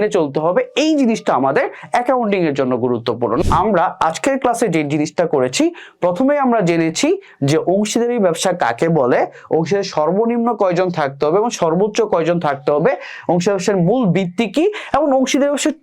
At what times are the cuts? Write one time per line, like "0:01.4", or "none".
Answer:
0:03.4